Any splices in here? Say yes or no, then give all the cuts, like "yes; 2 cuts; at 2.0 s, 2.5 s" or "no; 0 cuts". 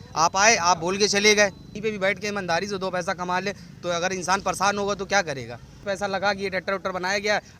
yes; 2 cuts; at 1.7 s, 5.7 s